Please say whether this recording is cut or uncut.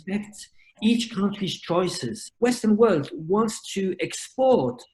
cut